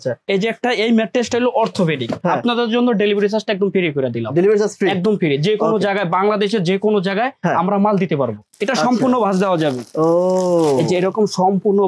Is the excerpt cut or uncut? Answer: cut